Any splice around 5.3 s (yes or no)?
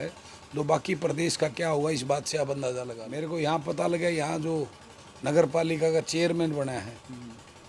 no